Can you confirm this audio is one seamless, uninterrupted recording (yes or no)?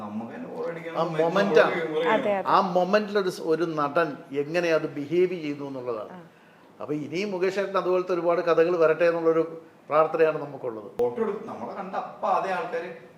no